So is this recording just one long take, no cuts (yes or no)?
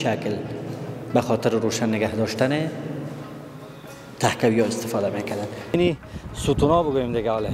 no